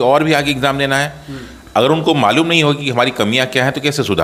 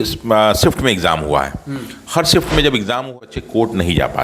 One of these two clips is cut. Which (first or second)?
second